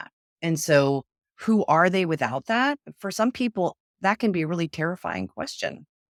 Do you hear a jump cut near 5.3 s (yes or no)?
no